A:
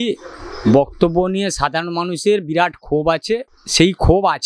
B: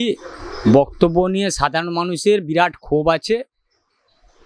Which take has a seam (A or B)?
A